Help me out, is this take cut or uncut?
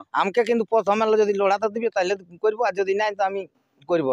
uncut